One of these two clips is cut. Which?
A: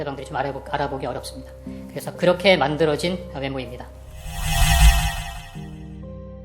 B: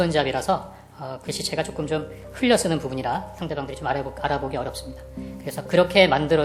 A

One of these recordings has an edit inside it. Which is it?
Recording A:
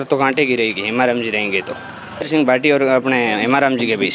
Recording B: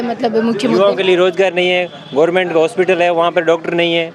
A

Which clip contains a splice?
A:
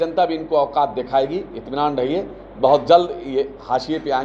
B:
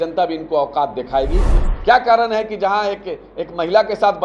B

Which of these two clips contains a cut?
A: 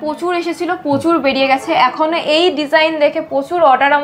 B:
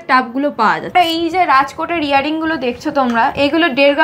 B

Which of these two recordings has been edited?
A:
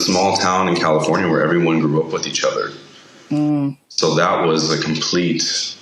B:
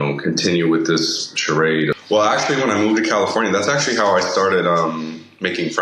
B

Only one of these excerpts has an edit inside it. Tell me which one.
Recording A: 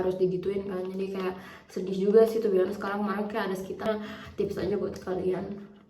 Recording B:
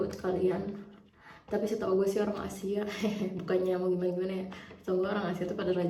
A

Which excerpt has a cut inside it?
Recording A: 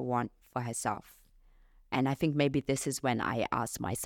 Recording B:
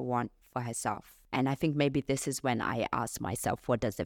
B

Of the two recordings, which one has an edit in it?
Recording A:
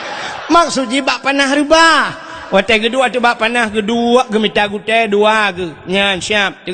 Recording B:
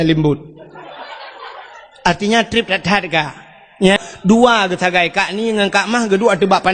B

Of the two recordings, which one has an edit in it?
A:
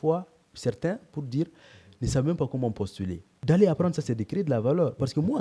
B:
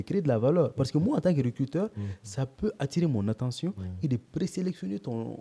A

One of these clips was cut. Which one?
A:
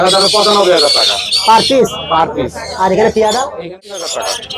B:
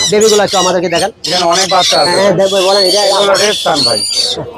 A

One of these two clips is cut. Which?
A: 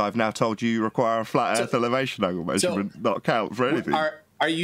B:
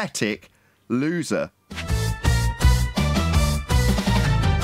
B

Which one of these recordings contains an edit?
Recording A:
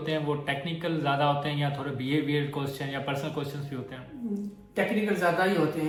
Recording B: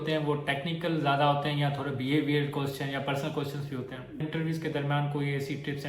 B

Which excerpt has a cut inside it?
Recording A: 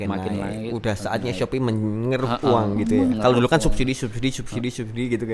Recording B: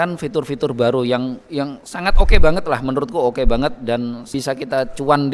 B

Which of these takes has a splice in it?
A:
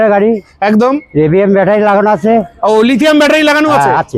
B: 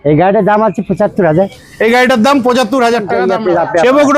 B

